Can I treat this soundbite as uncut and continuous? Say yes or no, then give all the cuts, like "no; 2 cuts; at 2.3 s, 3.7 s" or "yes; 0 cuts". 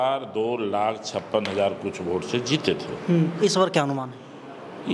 yes; 0 cuts